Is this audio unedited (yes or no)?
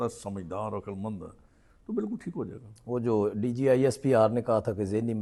yes